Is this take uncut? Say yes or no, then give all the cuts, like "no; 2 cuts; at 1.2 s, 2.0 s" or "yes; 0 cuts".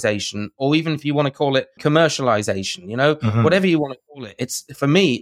no; 1 cut; at 1.8 s